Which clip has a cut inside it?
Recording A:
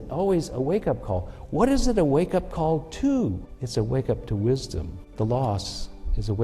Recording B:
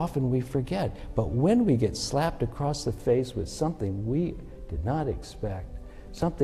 A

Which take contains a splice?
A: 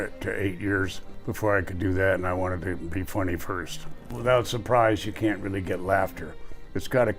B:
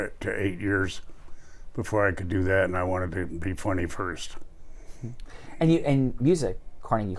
A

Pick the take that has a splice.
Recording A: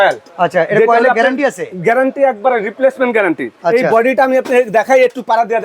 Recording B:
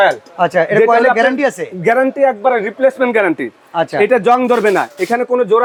A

